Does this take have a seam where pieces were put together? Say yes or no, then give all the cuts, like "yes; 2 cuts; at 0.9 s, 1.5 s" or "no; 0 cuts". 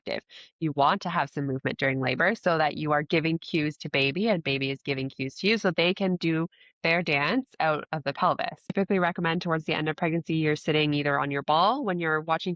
yes; 1 cut; at 8.6 s